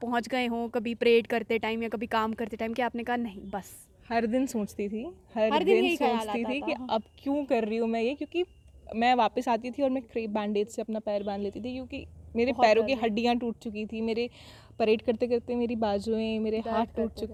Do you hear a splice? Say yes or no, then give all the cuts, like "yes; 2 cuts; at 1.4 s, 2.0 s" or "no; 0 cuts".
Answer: no; 0 cuts